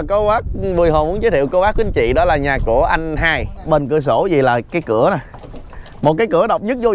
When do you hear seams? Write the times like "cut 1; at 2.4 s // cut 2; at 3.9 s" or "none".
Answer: cut 1; at 3.6 s